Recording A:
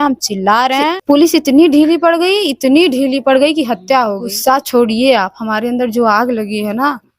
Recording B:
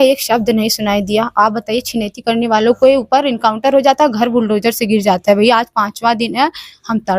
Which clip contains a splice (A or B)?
A